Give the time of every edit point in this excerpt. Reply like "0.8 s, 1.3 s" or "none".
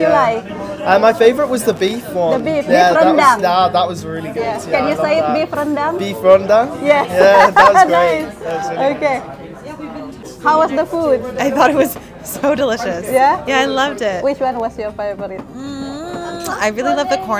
none